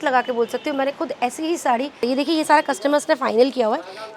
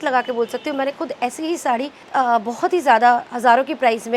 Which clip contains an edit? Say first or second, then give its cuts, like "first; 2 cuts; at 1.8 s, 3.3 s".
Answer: first; 1 cut; at 2.0 s